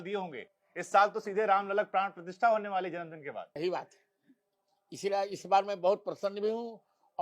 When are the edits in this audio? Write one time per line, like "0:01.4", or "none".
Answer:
0:03.6

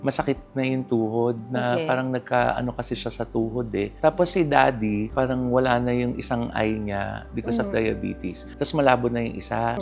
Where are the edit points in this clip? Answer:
none

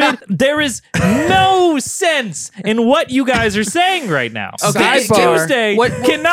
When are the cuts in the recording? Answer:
0:04.5

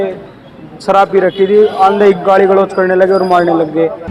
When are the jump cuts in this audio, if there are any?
none

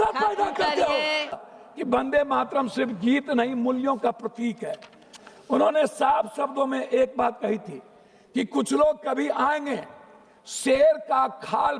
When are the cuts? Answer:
0:01.7

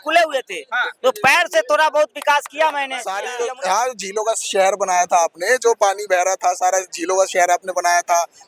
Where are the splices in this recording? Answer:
0:03.2

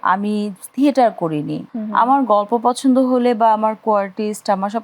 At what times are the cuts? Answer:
0:01.6

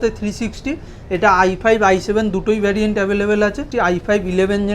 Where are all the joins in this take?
0:03.6

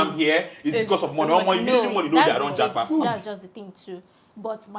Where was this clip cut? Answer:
0:02.9

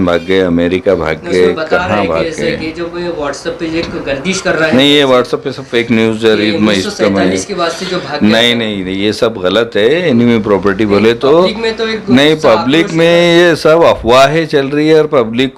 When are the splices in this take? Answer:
none

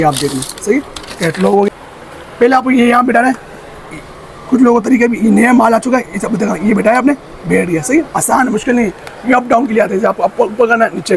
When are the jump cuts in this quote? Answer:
0:01.7

